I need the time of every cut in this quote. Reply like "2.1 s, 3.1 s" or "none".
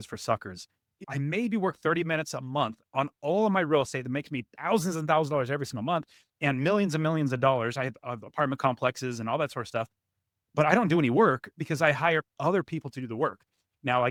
none

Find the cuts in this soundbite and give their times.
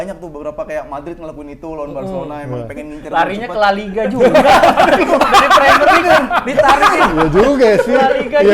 none

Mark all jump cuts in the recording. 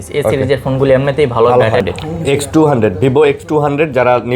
1.8 s

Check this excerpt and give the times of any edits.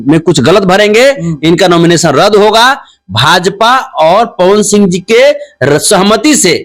none

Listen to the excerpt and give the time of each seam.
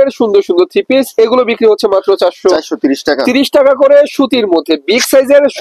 none

